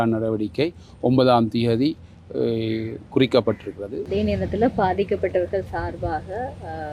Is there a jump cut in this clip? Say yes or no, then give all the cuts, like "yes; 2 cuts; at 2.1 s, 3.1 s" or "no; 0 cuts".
yes; 1 cut; at 4.0 s